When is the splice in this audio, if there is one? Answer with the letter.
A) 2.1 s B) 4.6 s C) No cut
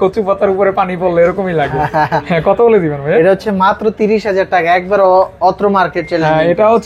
C